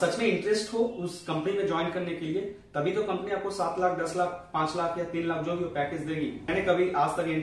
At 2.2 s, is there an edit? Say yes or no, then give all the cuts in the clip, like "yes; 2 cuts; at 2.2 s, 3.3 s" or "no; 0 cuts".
no; 1 cut; at 6.5 s